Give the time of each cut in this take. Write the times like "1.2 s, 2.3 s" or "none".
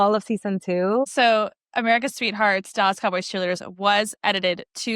1.1 s